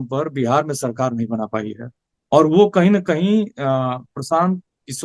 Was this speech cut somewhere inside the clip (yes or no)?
no